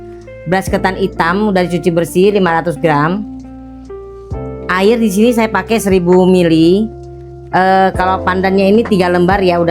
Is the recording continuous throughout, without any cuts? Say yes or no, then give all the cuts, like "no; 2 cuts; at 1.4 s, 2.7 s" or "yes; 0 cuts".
no; 2 cuts; at 3.2 s, 4.7 s